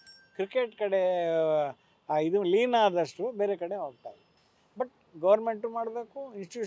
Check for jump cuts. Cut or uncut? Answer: uncut